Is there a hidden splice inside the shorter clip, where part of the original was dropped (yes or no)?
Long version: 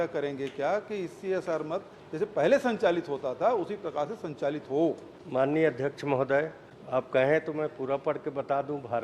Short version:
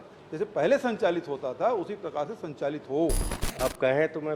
yes